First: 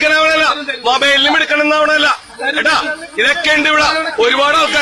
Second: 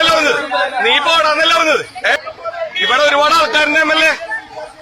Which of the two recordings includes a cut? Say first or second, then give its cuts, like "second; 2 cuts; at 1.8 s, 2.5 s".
second; 1 cut; at 2.2 s